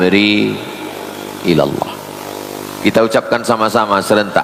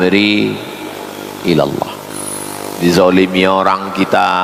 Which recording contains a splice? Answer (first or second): second